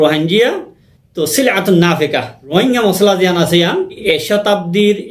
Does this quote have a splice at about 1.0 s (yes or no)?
no